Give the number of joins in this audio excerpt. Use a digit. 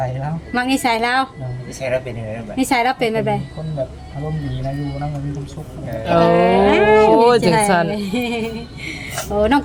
0